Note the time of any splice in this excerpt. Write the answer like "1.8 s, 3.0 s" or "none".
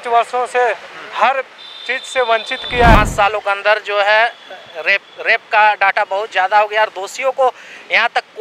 2.9 s